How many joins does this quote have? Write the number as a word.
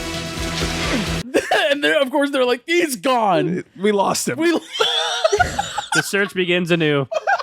one